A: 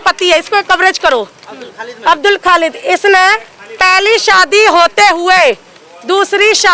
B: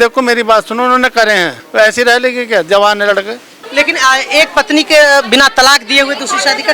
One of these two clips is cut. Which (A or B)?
B